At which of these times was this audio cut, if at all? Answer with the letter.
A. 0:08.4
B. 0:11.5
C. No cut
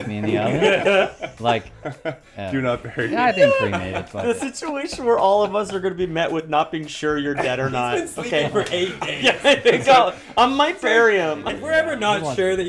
B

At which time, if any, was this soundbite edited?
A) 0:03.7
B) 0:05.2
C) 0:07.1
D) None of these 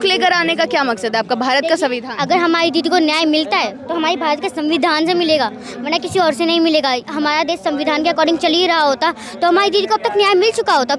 C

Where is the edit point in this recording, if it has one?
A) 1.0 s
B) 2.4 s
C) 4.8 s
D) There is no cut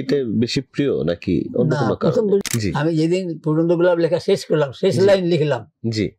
B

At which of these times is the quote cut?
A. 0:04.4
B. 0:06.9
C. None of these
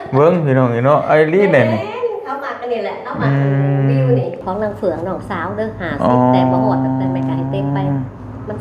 A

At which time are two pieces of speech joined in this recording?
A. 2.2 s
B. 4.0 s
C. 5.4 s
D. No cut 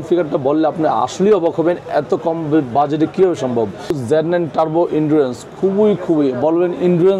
B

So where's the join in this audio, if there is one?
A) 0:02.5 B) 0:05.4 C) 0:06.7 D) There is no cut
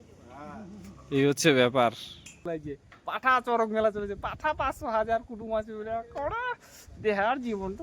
A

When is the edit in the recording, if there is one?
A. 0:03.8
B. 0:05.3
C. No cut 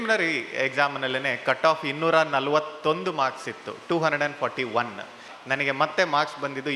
B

